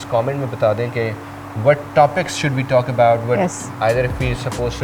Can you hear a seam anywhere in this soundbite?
no; 0 cuts

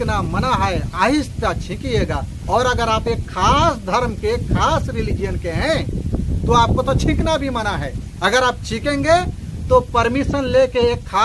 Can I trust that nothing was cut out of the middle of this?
yes; 0 cuts

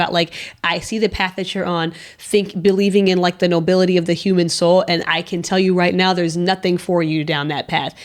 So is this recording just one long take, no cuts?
yes; 0 cuts

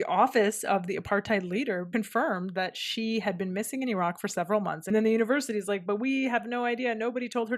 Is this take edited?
yes; 2 cuts; at 1.9 s, 4.9 s

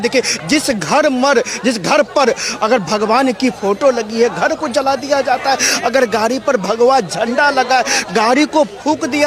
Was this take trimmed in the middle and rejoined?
no; 0 cuts

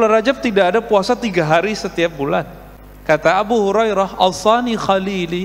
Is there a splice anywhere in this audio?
no; 0 cuts

